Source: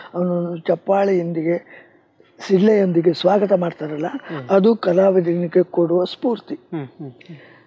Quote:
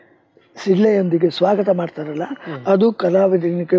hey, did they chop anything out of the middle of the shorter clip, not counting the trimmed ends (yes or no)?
no